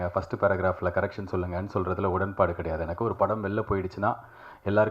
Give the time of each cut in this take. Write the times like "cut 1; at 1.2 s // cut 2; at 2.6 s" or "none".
none